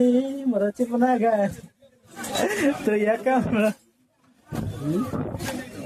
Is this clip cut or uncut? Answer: uncut